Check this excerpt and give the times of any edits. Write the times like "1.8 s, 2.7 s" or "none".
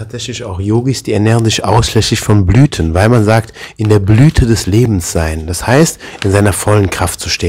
none